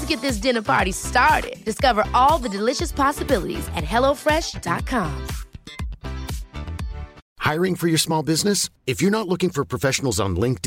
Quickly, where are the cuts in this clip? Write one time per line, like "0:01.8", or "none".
0:07.2